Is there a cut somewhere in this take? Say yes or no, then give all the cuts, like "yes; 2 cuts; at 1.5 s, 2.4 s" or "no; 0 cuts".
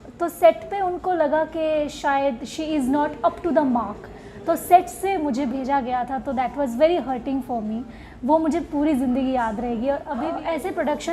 yes; 1 cut; at 10.1 s